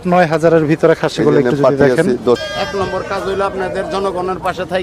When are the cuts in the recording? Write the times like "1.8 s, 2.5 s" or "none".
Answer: 2.4 s